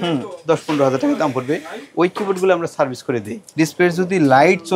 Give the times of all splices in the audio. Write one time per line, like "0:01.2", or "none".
0:03.4